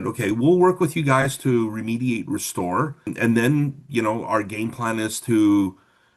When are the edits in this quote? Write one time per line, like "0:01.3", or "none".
0:03.1